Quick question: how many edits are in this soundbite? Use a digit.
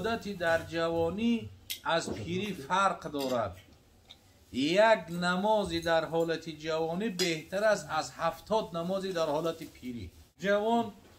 1